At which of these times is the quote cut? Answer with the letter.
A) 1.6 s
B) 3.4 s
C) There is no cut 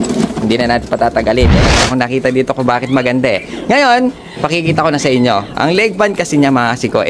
A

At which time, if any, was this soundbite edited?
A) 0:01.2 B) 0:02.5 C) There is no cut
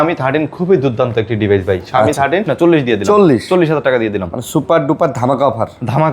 B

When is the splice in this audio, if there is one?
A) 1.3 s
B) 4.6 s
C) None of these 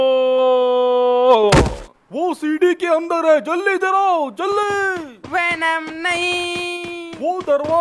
C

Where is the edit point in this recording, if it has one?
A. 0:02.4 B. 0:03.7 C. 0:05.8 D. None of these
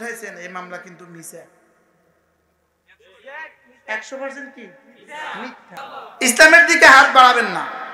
C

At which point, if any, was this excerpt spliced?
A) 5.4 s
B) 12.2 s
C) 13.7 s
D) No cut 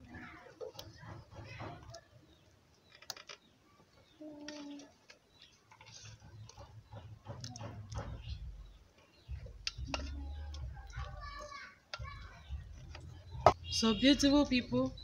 C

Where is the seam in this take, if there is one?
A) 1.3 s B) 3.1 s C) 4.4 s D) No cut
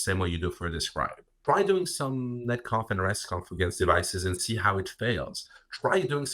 A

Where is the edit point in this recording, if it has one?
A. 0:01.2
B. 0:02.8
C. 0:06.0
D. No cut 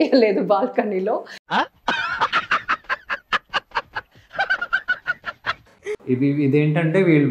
C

